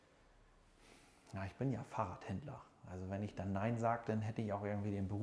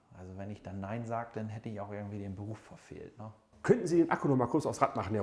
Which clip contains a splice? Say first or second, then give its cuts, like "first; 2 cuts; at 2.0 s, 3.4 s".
second; 1 cut; at 3.5 s